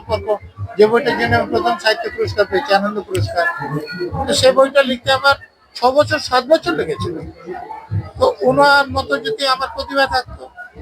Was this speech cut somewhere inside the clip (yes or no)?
no